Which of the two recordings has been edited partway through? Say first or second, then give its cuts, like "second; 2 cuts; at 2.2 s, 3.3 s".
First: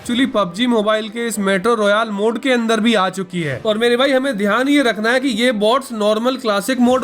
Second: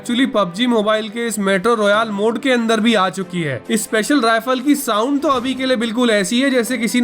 first; 1 cut; at 3.5 s